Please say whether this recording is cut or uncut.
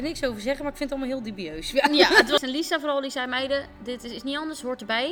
cut